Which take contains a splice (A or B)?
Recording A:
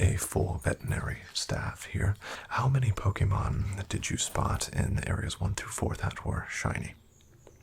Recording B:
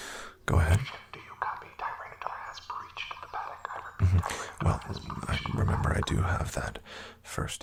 A